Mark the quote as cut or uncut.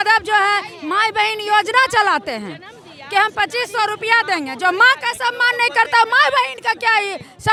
uncut